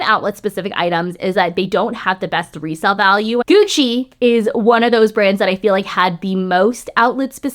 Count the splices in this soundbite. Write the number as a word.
two